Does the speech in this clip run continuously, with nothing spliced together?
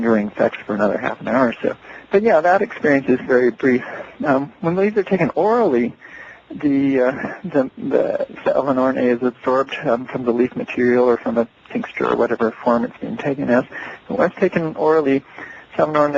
no; 1 cut; at 9.8 s

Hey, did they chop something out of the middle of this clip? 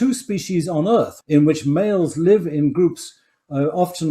yes; 1 cut; at 1.2 s

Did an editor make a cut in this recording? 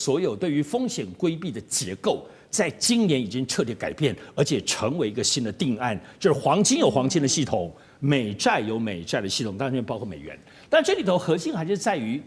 no; 0 cuts

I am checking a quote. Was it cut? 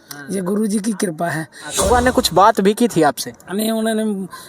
yes; 1 cut; at 1.9 s

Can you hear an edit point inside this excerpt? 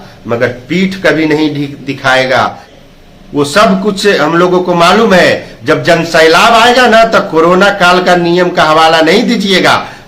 yes; 1 cut; at 2.7 s

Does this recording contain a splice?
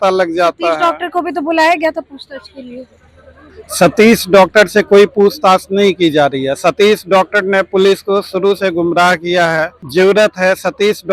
yes; 1 cut; at 9.8 s

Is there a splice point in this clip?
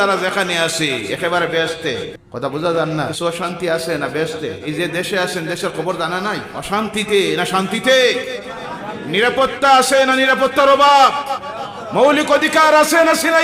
yes; 4 cuts; at 2.2 s, 3.1 s, 4.6 s, 6.5 s

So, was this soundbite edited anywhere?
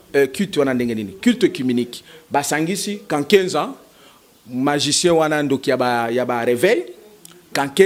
no; 0 cuts

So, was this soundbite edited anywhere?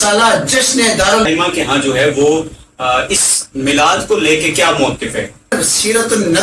yes; 2 cuts; at 1.3 s, 5.5 s

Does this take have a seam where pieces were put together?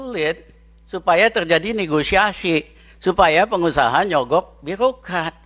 no; 0 cuts

